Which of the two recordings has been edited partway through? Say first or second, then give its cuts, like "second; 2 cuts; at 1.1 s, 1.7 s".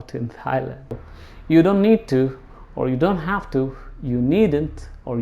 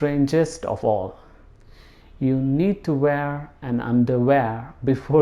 first; 1 cut; at 1.0 s